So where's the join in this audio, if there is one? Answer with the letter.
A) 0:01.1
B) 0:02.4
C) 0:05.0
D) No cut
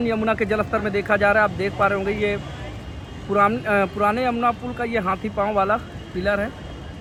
D